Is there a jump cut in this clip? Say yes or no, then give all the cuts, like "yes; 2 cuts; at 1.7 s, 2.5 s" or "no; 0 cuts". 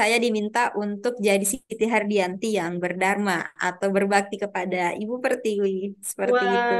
no; 0 cuts